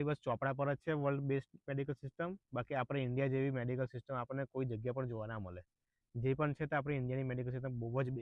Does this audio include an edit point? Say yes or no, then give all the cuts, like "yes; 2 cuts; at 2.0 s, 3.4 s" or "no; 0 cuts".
no; 0 cuts